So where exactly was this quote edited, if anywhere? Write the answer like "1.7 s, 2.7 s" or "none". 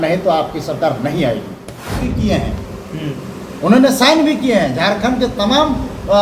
2.1 s